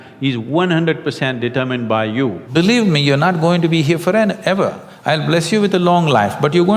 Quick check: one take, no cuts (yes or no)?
no